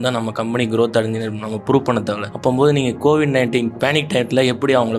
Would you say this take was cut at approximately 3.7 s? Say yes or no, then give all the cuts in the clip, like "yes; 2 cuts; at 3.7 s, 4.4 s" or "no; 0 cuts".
yes; 2 cuts; at 2.3 s, 3.7 s